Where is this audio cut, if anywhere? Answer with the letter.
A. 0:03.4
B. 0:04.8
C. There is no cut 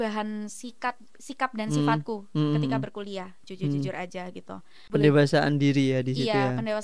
B